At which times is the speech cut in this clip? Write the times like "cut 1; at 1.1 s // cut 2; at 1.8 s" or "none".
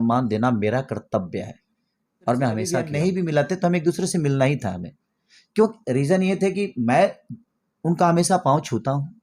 cut 1; at 2.9 s

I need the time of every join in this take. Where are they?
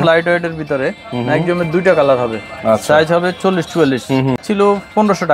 cut 1; at 4.4 s

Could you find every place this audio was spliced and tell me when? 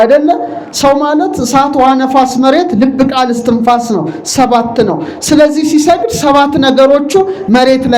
none

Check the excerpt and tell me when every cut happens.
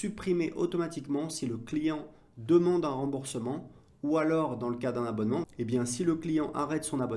cut 1; at 5.5 s

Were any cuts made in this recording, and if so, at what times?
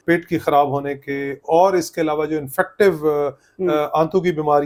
none

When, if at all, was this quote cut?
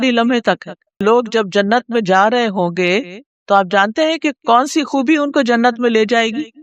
cut 1; at 1.0 s

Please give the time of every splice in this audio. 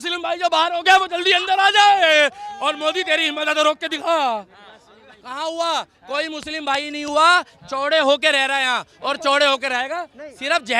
none

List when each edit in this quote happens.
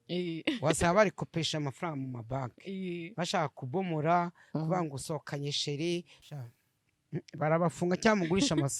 cut 1; at 6.2 s

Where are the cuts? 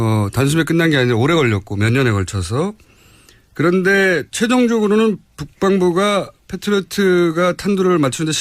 cut 1; at 5.2 s

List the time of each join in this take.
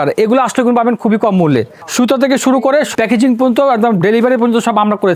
cut 1; at 1.8 s // cut 2; at 2.9 s

